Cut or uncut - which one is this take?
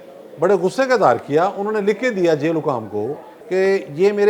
cut